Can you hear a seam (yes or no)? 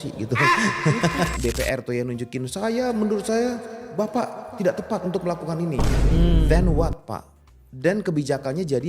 yes